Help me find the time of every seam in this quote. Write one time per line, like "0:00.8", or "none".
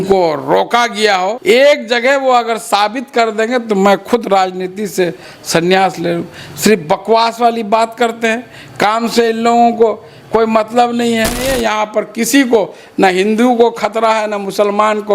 0:01.4
0:11.5